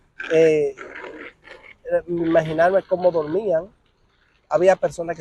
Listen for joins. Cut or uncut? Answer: uncut